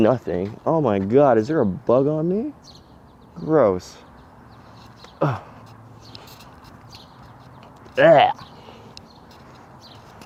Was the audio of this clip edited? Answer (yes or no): no